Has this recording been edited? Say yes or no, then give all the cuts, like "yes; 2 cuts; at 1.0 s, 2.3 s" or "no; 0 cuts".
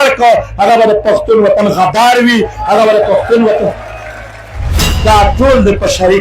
yes; 1 cut; at 4.9 s